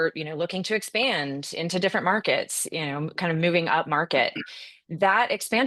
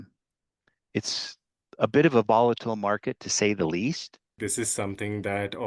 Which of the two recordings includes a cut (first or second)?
second